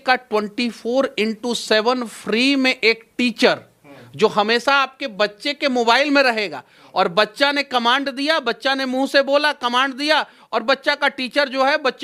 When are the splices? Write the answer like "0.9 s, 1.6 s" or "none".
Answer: none